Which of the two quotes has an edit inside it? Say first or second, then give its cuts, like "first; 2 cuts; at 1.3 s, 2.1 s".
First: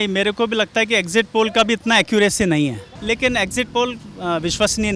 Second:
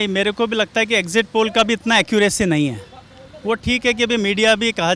first; 1 cut; at 2.9 s